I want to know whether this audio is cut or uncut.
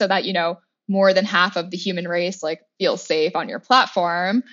uncut